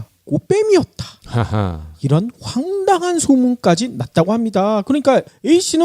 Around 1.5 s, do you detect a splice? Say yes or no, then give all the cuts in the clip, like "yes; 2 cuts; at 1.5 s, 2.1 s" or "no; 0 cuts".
no; 1 cut; at 3.4 s